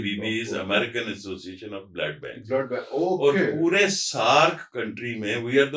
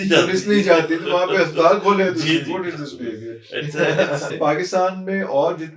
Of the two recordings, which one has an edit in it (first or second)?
second